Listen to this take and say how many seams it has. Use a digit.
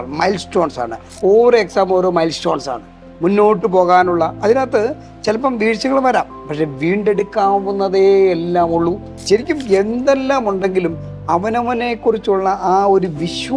2